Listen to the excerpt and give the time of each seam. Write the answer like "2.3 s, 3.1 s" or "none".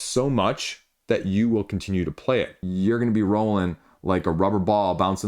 2.6 s